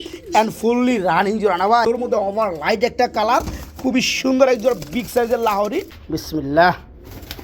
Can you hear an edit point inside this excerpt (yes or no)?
yes